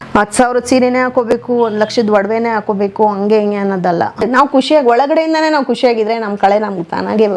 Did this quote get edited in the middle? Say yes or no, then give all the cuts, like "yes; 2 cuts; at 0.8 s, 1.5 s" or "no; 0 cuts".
yes; 1 cut; at 4.2 s